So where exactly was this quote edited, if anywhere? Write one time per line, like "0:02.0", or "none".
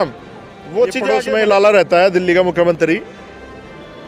0:01.0